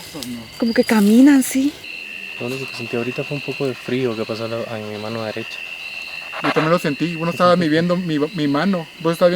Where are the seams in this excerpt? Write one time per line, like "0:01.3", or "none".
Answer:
0:01.9